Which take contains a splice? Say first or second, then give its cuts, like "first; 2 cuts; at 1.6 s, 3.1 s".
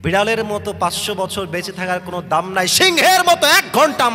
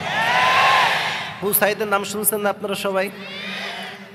second; 1 cut; at 1.4 s